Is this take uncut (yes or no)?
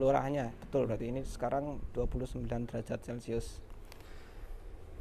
yes